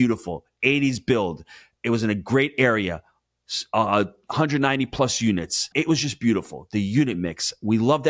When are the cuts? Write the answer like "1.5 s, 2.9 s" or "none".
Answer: 5.7 s